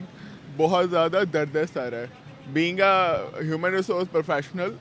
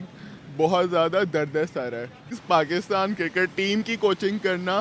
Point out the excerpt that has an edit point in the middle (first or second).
second